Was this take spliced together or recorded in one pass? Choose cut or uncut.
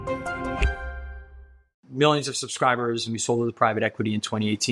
cut